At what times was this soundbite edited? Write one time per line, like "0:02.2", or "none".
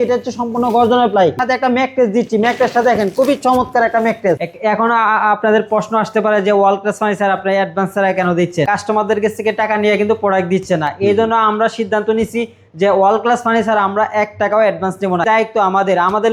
0:01.4
0:04.4
0:08.7
0:15.2

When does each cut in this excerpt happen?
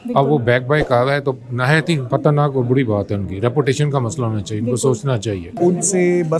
0:02.0
0:05.5

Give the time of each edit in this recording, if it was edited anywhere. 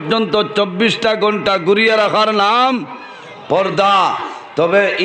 none

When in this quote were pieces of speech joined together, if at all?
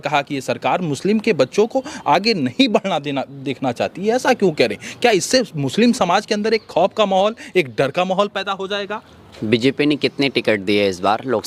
none

